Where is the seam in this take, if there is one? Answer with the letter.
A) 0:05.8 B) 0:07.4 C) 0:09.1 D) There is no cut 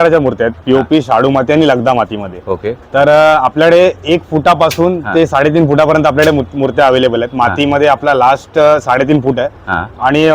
D